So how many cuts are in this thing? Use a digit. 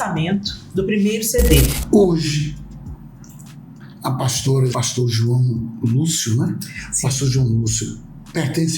2